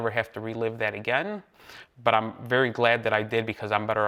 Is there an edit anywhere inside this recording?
no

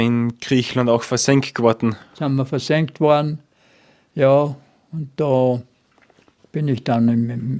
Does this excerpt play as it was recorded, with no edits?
yes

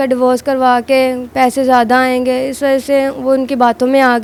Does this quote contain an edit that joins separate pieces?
no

